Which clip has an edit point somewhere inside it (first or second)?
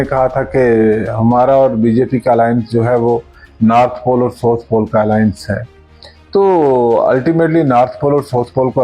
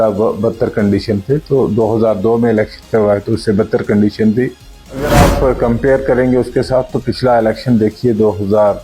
second